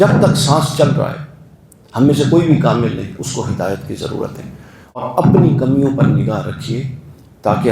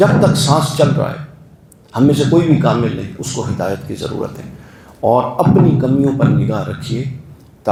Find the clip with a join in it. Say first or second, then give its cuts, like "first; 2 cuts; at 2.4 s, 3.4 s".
first; 1 cut; at 5.0 s